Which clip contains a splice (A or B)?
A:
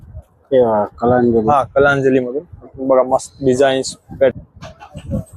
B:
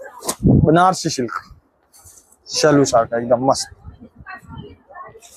A